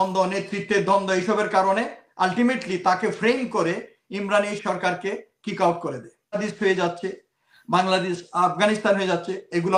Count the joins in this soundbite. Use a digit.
1